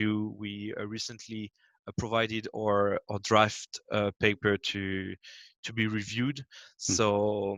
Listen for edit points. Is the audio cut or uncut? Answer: uncut